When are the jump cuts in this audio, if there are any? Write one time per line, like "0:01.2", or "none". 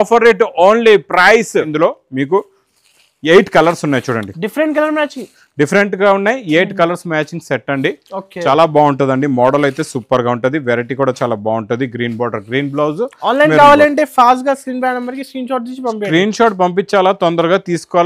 0:01.7